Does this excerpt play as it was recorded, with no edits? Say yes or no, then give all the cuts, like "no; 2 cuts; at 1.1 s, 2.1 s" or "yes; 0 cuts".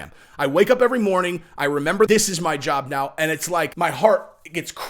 no; 2 cuts; at 2.1 s, 3.7 s